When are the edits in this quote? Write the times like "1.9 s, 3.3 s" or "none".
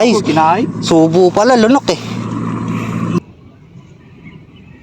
3.2 s